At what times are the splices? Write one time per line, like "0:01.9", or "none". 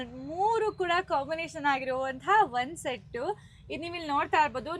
none